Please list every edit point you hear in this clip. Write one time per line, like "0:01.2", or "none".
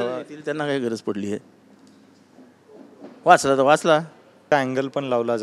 0:04.5